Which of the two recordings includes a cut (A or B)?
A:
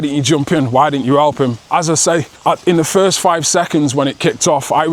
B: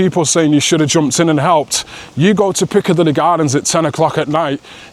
A